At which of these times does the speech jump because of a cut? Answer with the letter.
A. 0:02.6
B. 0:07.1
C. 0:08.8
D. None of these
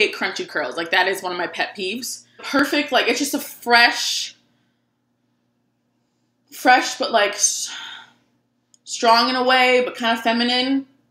A